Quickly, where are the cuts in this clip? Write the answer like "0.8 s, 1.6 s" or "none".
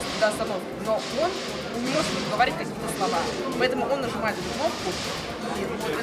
none